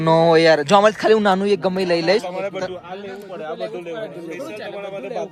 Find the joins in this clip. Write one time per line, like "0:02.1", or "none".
none